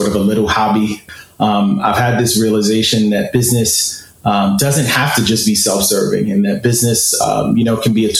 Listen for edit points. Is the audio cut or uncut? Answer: cut